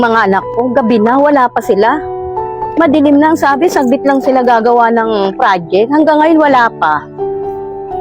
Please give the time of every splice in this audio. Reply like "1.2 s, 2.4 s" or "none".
7.1 s